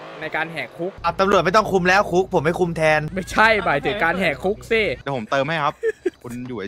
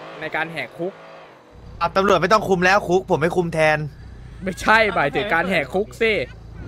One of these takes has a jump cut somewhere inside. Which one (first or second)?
first